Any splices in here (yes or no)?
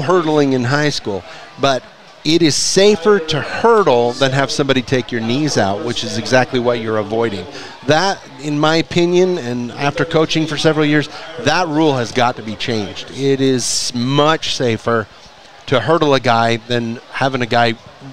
no